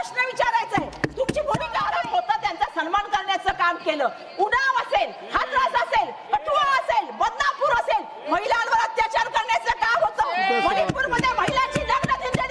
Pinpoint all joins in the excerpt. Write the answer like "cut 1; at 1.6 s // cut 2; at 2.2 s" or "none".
cut 1; at 1.8 s